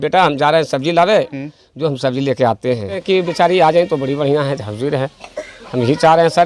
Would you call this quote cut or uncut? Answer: cut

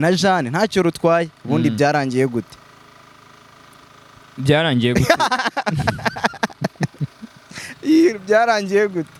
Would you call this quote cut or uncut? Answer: uncut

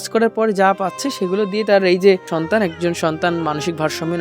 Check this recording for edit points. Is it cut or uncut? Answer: cut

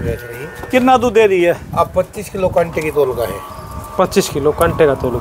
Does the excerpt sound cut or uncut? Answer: uncut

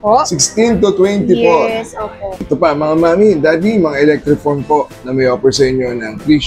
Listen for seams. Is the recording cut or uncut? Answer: cut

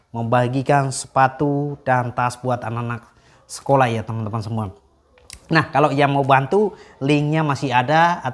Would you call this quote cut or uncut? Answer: uncut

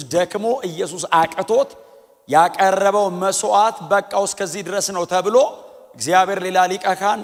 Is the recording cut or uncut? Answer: uncut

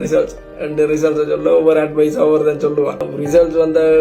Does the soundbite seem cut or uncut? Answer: cut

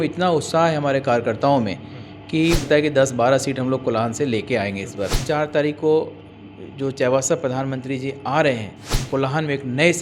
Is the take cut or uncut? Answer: cut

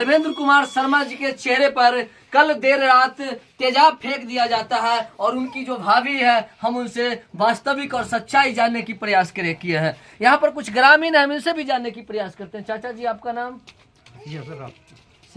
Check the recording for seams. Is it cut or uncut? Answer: uncut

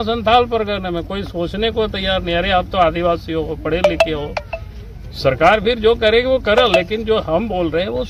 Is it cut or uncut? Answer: uncut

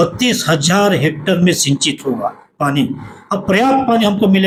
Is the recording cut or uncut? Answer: uncut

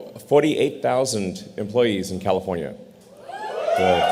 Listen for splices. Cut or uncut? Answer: uncut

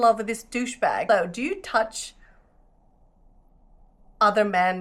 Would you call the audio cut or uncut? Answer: cut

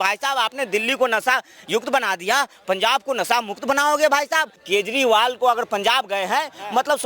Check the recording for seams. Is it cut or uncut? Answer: cut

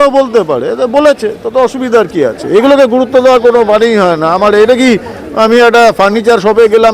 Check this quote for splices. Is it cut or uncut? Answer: uncut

